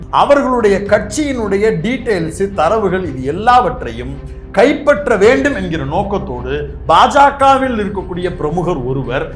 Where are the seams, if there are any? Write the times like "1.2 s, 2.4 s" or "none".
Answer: none

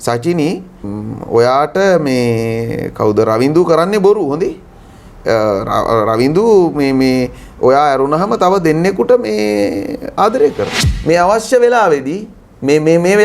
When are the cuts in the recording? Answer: 0.9 s, 10.9 s

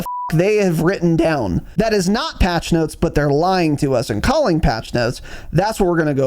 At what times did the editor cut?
1.6 s

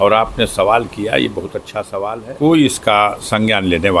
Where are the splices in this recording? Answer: 1.9 s

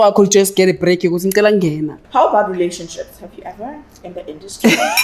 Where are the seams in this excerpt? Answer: 1.9 s

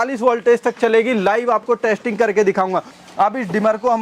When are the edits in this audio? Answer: 2.9 s

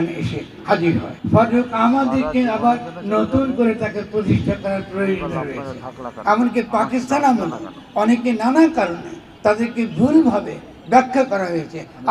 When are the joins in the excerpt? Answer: 1.1 s

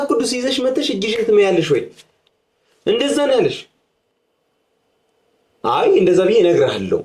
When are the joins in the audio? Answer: none

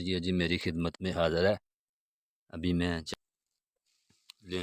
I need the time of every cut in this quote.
3.1 s

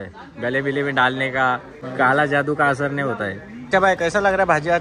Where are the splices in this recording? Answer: 1.8 s, 3.7 s

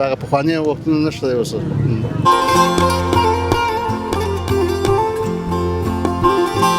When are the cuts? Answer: 2.2 s

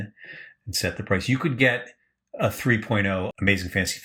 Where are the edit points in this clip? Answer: none

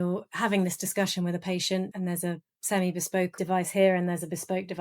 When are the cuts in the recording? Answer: 3.3 s

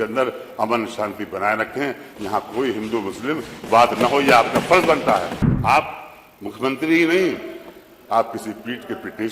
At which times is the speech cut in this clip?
5.4 s

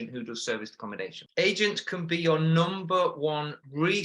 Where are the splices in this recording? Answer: 1.2 s

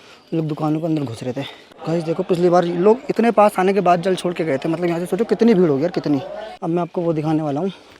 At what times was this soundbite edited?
1.7 s, 6.5 s

